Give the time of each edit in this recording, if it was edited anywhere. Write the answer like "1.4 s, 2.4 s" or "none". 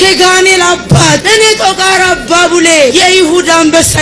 1.2 s, 2.9 s

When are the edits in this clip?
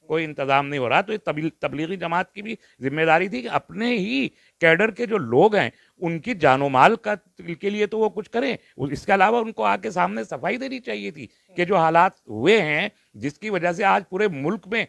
none

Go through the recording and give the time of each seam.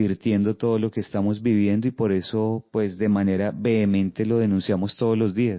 none

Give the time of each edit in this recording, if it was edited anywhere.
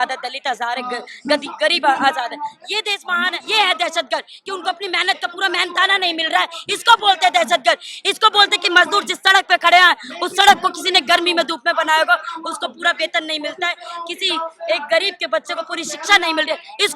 3.3 s

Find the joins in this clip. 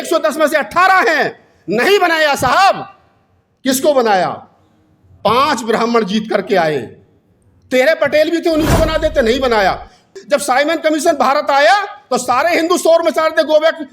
10.1 s

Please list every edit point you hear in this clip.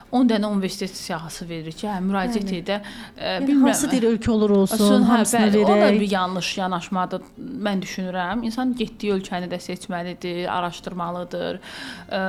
none

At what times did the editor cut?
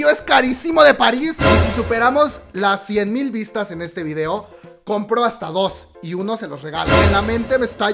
1.5 s, 7.0 s

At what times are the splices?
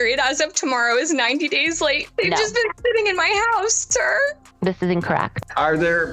2.0 s, 5.3 s

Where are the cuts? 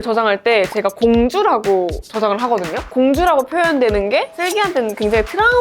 2.8 s

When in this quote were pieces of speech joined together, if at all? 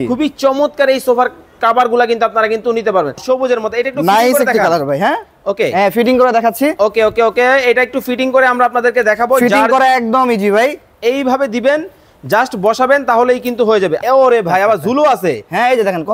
3.2 s, 14.0 s

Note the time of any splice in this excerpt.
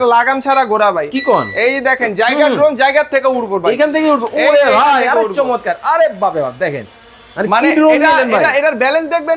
none

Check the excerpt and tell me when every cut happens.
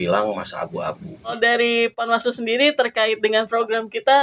1.4 s

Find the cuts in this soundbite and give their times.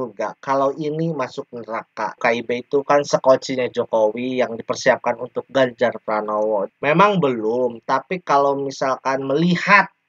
2.2 s, 6.7 s

